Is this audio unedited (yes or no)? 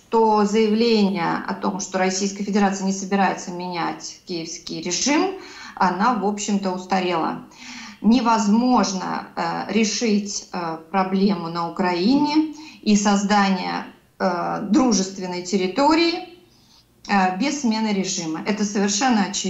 yes